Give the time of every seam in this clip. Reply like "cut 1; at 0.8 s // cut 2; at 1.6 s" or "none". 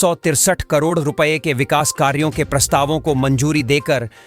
none